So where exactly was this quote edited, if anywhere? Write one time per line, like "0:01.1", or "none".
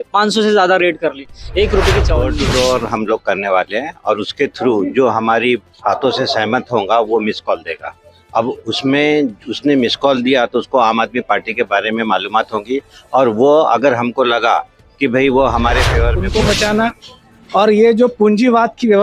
0:02.2
0:16.2